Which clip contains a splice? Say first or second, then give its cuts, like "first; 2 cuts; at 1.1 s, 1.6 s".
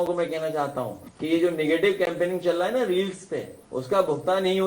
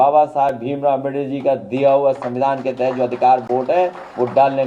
first; 2 cuts; at 1.0 s, 3.6 s